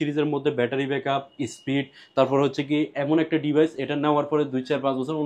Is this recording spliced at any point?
no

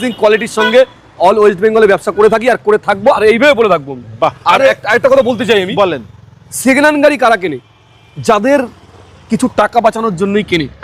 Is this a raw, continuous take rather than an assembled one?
yes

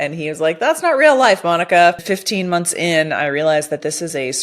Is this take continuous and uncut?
no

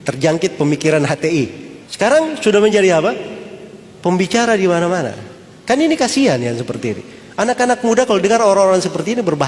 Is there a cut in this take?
no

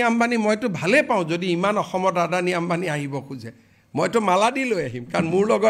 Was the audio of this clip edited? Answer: no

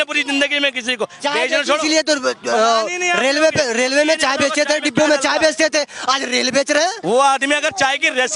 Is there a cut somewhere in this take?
yes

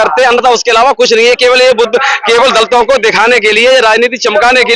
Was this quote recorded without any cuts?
yes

